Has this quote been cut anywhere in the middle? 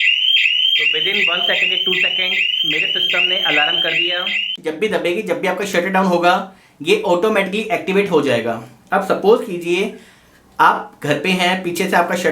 yes; 1 cut; at 4.5 s

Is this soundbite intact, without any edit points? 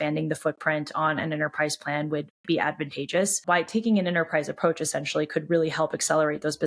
no; 1 cut; at 3.4 s

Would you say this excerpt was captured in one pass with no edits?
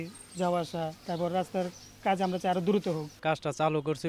no; 2 cuts; at 1.0 s, 3.1 s

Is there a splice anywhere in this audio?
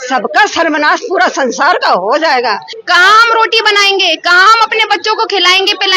yes; 1 cut; at 2.7 s

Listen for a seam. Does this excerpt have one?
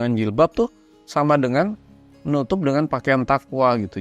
no; 0 cuts

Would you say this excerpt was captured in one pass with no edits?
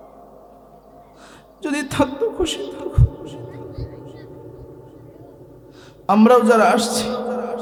yes; 0 cuts

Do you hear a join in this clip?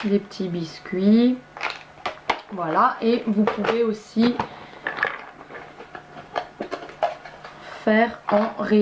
no; 0 cuts

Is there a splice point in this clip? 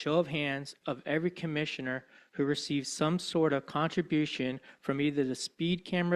no; 0 cuts

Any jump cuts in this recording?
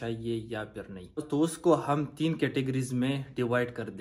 no; 0 cuts

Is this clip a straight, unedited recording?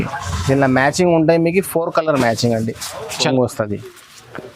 no; 1 cut; at 3.3 s

